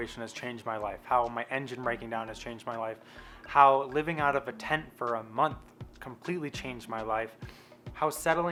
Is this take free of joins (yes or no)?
yes